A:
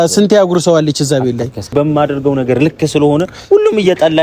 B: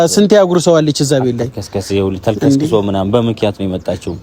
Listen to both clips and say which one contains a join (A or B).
A